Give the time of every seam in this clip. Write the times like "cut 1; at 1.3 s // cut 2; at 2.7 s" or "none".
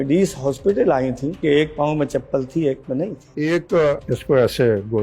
cut 1; at 1.4 s // cut 2; at 3.2 s // cut 3; at 4.1 s